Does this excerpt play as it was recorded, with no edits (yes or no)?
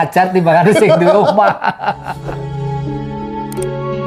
yes